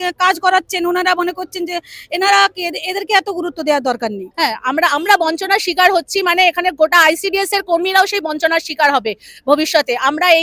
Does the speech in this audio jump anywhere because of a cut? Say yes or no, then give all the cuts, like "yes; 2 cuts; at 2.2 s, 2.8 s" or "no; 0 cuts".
yes; 1 cut; at 4.2 s